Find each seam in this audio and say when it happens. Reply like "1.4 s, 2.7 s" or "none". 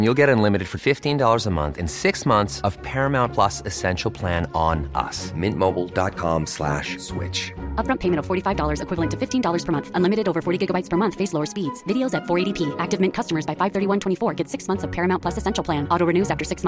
none